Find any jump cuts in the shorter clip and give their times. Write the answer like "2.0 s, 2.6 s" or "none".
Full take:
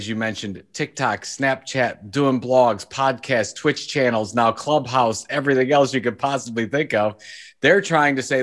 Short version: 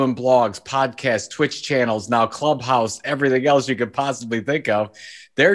none